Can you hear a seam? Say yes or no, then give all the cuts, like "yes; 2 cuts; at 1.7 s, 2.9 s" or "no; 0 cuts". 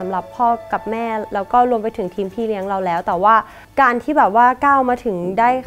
yes; 2 cuts; at 1.3 s, 3.6 s